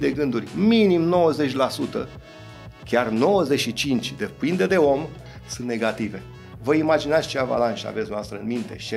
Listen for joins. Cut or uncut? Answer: uncut